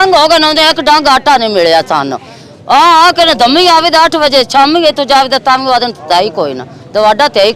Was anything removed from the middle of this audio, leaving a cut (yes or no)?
no